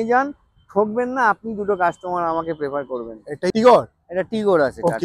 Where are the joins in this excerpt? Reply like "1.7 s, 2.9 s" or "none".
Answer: 3.5 s